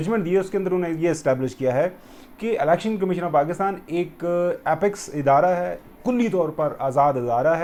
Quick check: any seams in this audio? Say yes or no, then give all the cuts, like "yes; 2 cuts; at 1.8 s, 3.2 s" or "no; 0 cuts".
no; 0 cuts